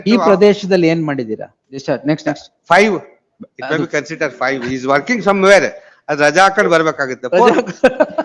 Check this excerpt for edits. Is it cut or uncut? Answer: cut